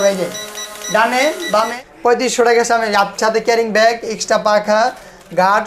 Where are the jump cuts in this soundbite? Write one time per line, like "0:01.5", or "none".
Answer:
0:01.6